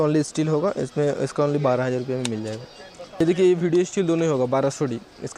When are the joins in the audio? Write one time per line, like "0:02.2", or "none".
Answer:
0:03.2